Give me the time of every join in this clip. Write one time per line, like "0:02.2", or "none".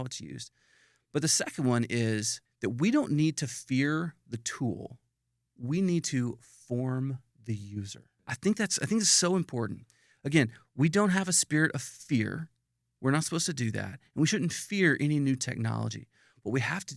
0:02.4
0:08.3